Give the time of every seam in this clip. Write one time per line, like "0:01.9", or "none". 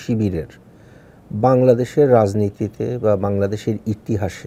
none